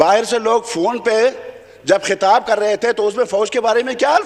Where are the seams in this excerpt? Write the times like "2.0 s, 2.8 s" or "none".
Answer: none